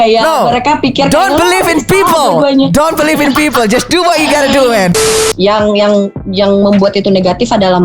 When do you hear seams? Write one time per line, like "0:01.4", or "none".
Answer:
0:05.2